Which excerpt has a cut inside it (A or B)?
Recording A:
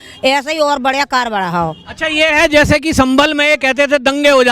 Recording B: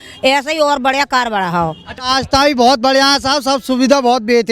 B